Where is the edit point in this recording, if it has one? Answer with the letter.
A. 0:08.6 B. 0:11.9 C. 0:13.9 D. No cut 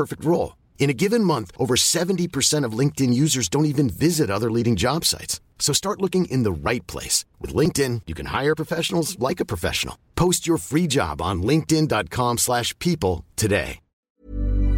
C